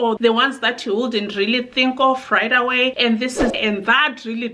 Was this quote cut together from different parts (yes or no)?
yes